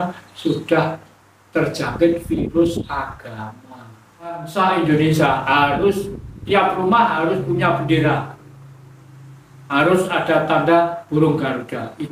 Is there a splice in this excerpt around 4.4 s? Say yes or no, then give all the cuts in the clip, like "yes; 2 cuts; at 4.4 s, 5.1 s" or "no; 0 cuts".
yes; 1 cut; at 4.4 s